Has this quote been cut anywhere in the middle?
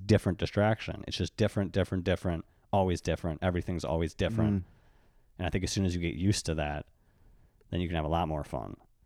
no; 0 cuts

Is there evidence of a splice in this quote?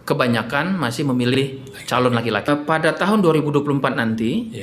yes; 1 cut; at 2.5 s

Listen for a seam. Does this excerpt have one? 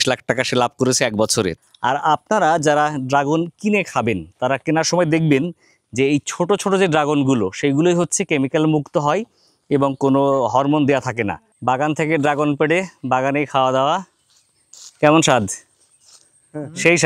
yes; 2 cuts; at 1.5 s, 11.4 s

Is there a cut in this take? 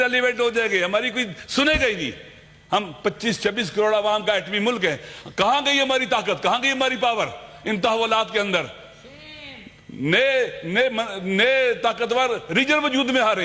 no; 0 cuts

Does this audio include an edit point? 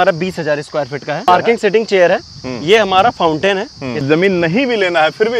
yes; 2 cuts; at 1.2 s, 4.0 s

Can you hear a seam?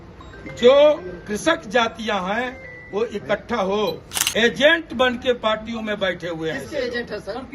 yes; 1 cut; at 4.1 s

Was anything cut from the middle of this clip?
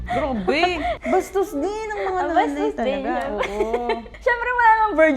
yes; 2 cuts; at 1.0 s, 4.1 s

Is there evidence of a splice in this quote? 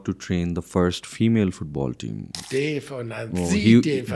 yes; 1 cut; at 2.3 s

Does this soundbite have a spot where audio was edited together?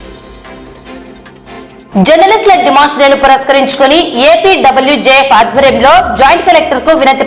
no; 0 cuts

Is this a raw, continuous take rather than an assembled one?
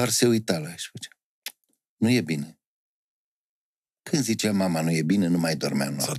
yes; 0 cuts

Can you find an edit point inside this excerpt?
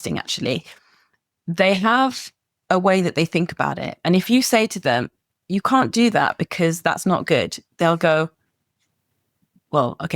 no; 0 cuts

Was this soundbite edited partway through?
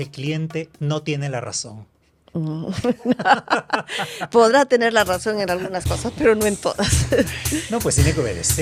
no; 0 cuts

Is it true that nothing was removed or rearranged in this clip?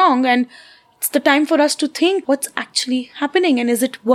no; 1 cut; at 2.2 s

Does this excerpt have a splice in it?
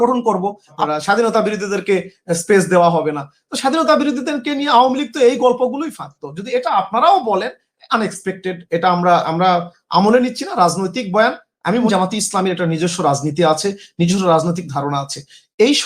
yes; 2 cuts; at 0.8 s, 11.9 s

